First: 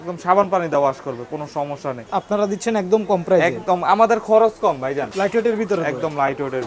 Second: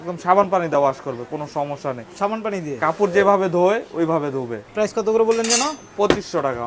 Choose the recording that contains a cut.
first; 2 cuts; at 2.0 s, 5.1 s

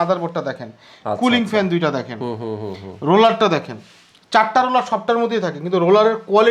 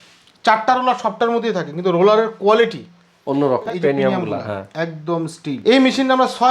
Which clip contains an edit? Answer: second; 2 cuts; at 3.6 s, 5.5 s

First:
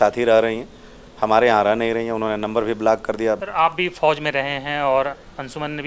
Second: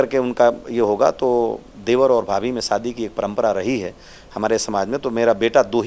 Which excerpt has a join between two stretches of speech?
first; 1 cut; at 3.4 s

